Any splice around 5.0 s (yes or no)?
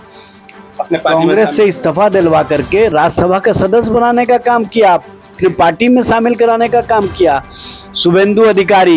no